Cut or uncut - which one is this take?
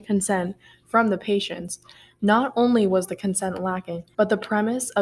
cut